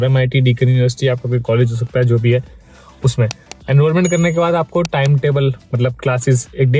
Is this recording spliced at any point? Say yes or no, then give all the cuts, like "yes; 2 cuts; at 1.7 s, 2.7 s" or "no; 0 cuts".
no; 0 cuts